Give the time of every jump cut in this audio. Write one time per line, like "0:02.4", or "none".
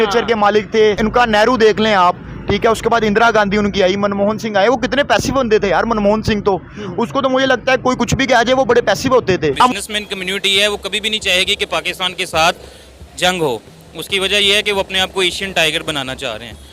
0:09.7